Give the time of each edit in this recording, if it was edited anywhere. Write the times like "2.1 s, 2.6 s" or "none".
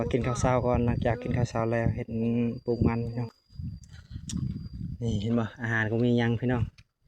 3.3 s